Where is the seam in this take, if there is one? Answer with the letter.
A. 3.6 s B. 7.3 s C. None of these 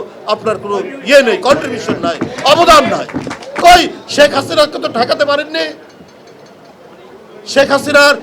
A